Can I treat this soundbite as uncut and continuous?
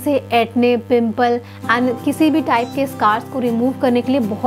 yes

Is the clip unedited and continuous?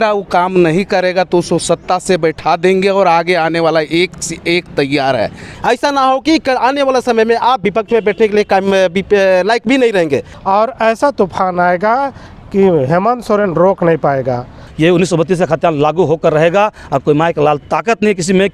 no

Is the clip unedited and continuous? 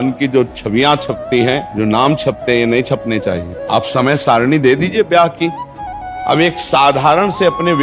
no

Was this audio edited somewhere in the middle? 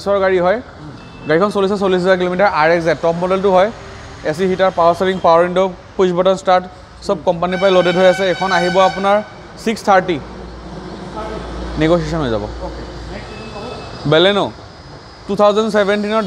no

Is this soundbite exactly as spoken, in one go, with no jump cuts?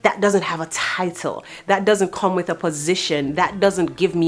yes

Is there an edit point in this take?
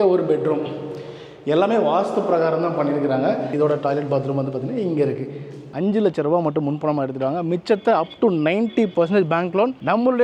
yes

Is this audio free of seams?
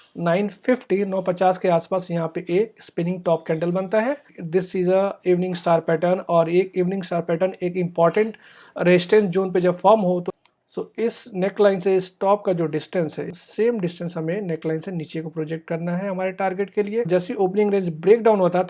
no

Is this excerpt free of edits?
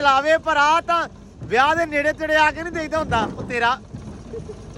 yes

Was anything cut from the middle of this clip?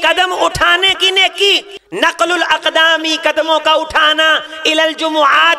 yes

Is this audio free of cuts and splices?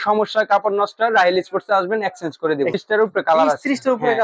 no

